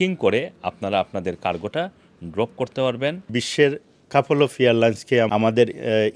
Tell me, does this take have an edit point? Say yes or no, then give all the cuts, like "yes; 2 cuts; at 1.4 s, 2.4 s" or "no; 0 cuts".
yes; 2 cuts; at 3.4 s, 5.3 s